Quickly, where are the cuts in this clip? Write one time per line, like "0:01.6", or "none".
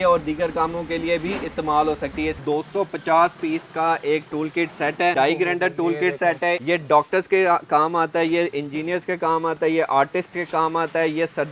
0:02.4
0:05.1
0:06.6